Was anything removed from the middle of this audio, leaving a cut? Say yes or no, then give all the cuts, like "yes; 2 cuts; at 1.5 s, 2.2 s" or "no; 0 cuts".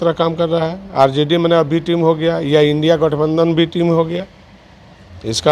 no; 0 cuts